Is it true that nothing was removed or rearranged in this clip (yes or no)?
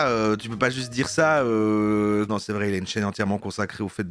no